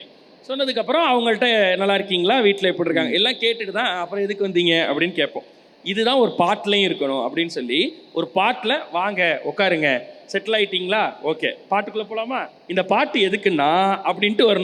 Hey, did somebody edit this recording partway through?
no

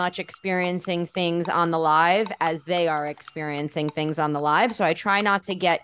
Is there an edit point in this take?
no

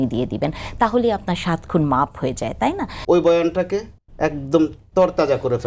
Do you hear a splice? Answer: yes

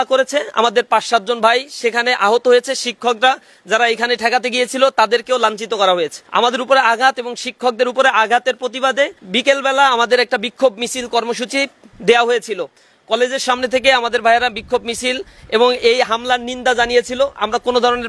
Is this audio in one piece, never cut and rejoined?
no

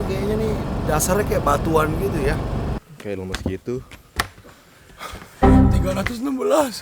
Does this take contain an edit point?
yes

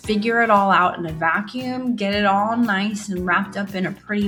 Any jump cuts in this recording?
no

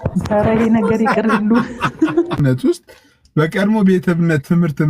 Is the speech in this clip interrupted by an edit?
yes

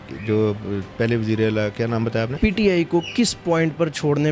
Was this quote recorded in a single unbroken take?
no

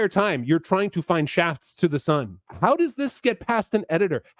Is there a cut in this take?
yes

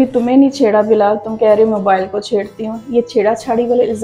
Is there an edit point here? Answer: no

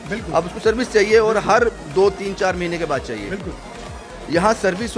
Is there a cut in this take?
no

